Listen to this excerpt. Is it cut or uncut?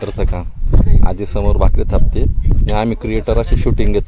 uncut